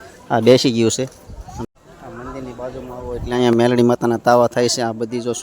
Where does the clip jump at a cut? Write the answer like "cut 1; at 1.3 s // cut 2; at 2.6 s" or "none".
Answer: cut 1; at 1.5 s